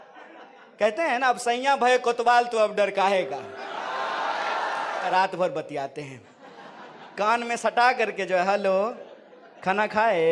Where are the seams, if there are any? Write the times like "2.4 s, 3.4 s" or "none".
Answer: 5.1 s